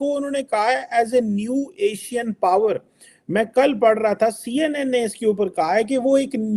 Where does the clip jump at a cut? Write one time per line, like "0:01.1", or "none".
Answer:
0:02.7